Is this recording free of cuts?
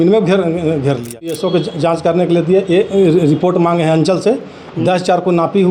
no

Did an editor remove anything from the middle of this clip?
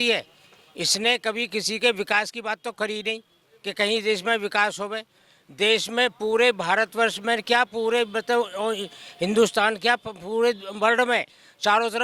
no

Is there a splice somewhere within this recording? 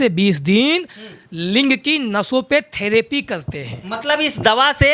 no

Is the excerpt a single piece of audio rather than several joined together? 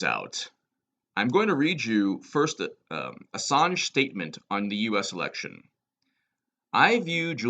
no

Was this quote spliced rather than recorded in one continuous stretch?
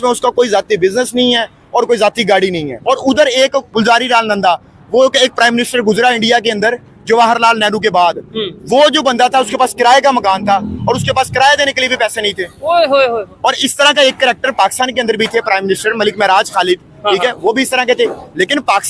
yes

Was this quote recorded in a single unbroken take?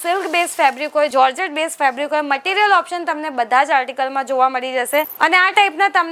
yes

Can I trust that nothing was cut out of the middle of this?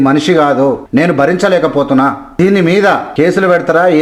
no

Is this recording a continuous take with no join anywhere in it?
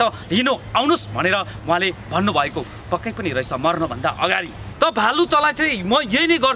no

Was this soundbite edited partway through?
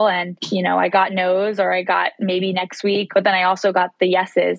yes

